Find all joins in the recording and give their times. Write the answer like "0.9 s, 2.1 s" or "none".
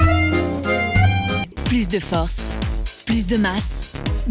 1.5 s